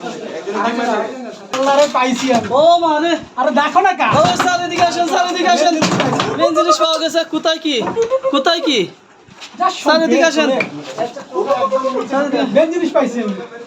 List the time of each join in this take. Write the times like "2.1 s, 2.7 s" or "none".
1.5 s

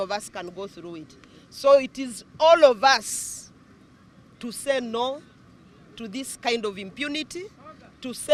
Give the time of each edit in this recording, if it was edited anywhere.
none

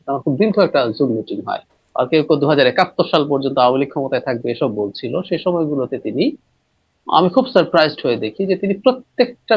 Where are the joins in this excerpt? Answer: 1.8 s

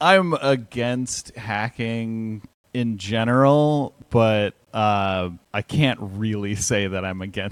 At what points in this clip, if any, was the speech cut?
none

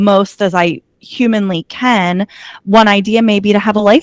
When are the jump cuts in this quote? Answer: none

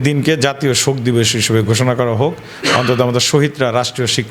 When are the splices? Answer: none

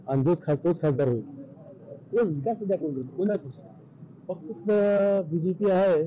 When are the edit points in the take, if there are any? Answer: none

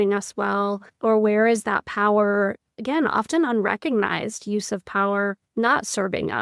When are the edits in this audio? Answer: 1.0 s, 5.5 s

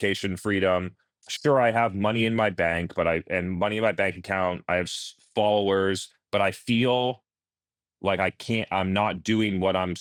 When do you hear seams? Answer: none

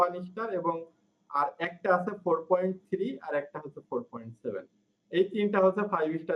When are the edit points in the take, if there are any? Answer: none

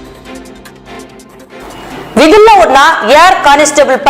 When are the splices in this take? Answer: 0.9 s

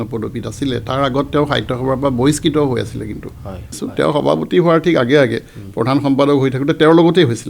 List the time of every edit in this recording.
3.8 s

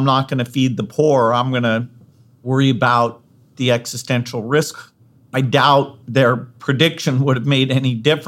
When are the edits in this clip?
3.5 s, 4.7 s

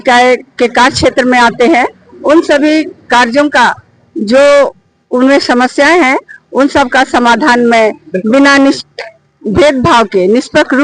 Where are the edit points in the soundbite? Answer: none

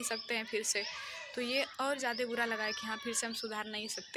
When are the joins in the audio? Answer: none

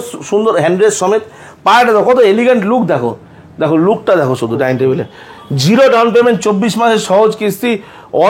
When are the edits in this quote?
none

